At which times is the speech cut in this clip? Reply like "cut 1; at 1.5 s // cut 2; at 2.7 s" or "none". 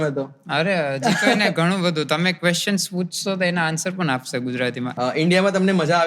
cut 1; at 4.9 s